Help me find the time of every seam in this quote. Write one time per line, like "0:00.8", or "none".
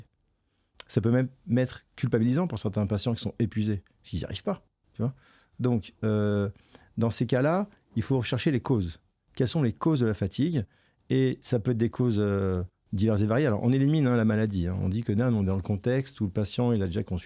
none